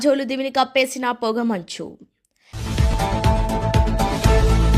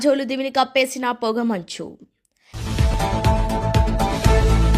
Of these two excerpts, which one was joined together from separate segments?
second; 1 cut; at 2.6 s

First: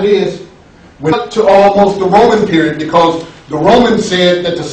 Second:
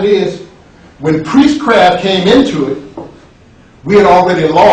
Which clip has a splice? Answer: second; 1 cut; at 1.2 s

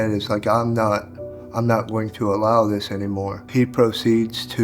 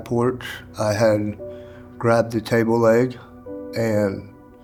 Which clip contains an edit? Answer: first; 1 cut; at 3.4 s

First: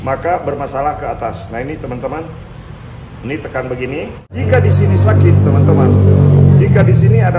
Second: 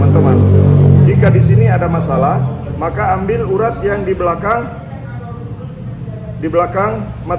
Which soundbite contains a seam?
first; 1 cut; at 4.4 s

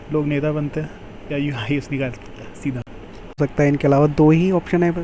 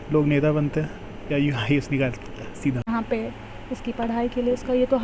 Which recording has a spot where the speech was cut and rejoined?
second; 1 cut; at 2.8 s

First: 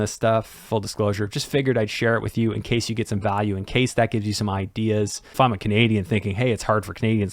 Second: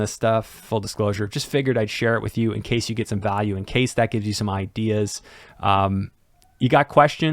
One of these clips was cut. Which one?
first; 1 cut; at 5.2 s

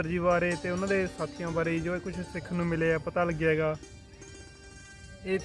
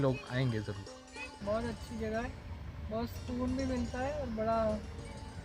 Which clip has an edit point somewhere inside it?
second; 1 cut; at 1.3 s

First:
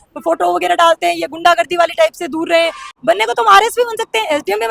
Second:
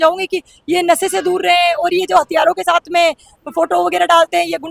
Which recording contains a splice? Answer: first; 1 cut; at 2.8 s

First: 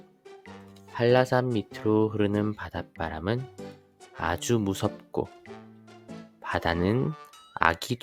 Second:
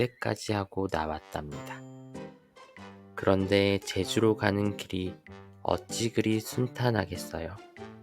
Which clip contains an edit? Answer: second; 2 cuts; at 1.5 s, 3.2 s

